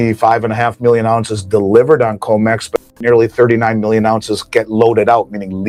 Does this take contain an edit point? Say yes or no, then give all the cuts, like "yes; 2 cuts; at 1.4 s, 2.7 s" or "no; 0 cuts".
no; 0 cuts